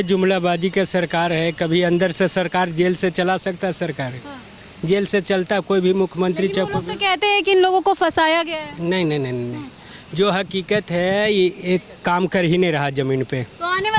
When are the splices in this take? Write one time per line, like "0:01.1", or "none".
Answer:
none